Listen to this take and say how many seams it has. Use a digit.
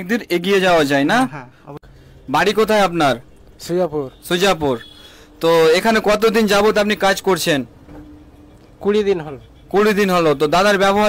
1